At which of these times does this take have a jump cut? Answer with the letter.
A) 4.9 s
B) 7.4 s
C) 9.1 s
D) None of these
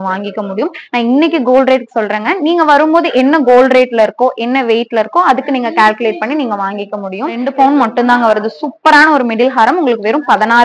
B